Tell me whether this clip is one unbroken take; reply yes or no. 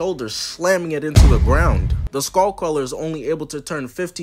yes